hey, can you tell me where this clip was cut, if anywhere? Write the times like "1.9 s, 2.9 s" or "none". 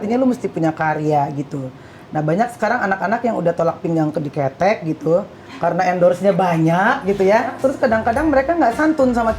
7.5 s